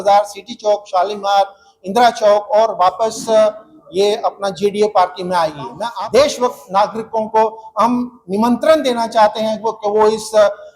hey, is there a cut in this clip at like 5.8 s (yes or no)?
yes